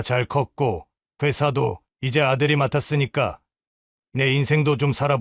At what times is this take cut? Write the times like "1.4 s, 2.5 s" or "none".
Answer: none